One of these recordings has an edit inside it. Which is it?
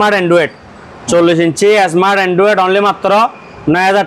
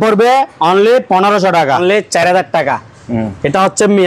second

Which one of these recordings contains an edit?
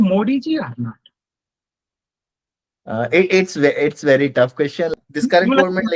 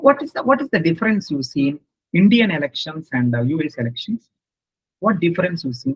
first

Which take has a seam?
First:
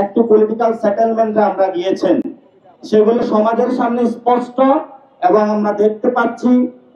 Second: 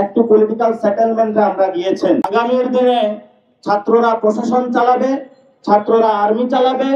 second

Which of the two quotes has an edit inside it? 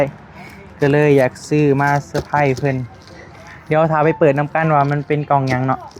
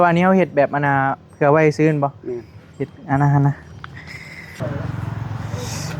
second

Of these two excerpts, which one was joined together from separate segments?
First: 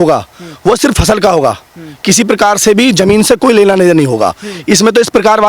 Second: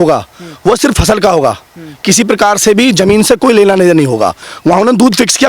second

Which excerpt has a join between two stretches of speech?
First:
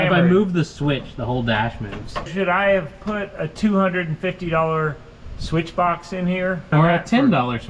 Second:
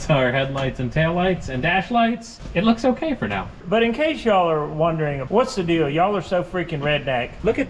first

